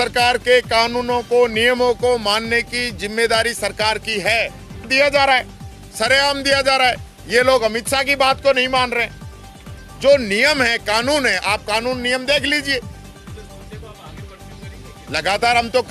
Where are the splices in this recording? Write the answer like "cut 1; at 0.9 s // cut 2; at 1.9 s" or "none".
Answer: cut 1; at 4.9 s